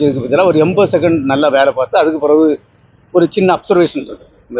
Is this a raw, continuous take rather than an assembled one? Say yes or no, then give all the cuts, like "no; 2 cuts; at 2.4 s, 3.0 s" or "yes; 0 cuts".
yes; 0 cuts